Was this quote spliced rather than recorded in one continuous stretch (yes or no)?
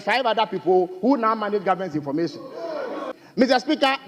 yes